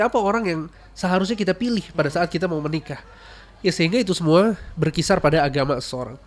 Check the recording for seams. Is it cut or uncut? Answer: uncut